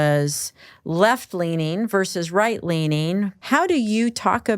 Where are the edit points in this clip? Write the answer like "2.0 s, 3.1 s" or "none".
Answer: 3.4 s